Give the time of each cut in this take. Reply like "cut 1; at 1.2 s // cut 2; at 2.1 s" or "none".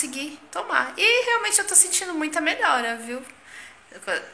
none